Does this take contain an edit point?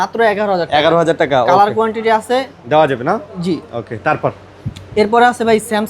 no; 0 cuts

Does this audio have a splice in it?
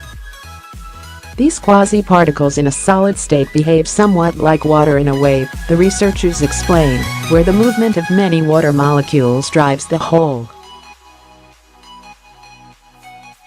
yes; 2 cuts; at 1.4 s, 11.0 s

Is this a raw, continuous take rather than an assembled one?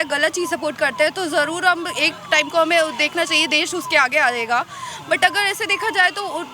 yes; 0 cuts

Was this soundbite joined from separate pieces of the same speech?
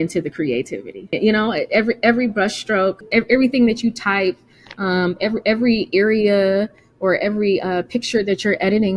yes; 2 cuts; at 1.1 s, 3.0 s

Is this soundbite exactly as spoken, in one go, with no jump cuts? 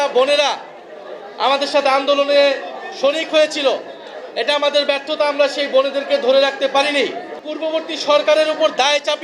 no; 1 cut; at 7.5 s

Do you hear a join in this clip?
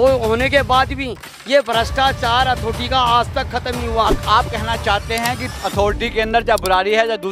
yes; 1 cut; at 4.2 s

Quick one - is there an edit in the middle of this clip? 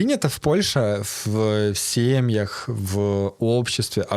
no; 0 cuts

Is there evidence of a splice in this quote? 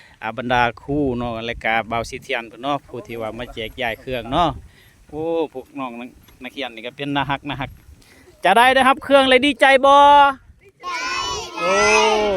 yes; 1 cut; at 10.8 s

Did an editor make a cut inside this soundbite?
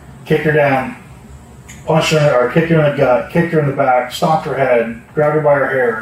no; 0 cuts

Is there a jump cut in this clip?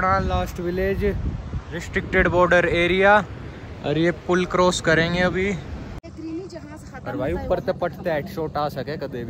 yes; 1 cut; at 6.1 s

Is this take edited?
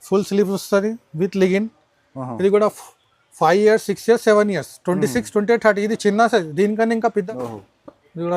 yes; 1 cut; at 7.2 s

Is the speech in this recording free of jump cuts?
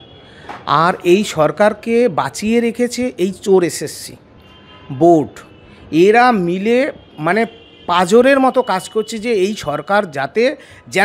yes; 0 cuts

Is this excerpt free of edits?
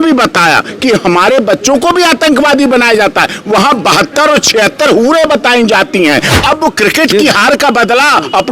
no; 1 cut; at 6.3 s

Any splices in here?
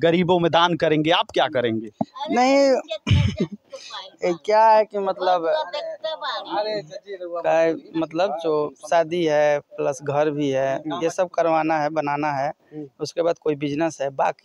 no; 0 cuts

